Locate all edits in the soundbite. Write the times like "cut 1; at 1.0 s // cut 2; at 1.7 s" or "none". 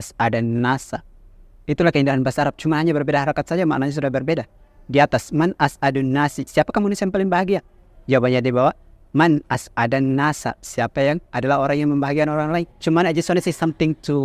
cut 1; at 12.7 s